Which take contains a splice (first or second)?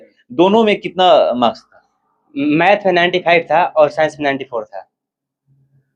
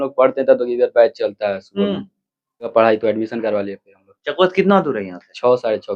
second